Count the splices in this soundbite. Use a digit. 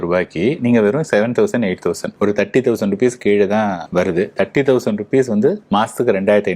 3